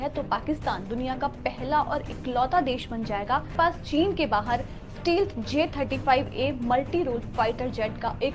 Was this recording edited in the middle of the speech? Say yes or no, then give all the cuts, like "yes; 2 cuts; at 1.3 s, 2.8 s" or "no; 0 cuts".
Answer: no; 0 cuts